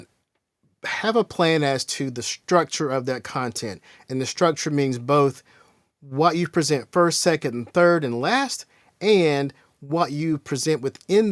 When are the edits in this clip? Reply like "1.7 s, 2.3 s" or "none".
none